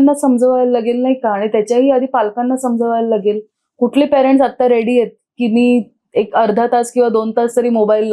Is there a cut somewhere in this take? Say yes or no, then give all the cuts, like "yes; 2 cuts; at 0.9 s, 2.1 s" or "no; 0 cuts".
no; 0 cuts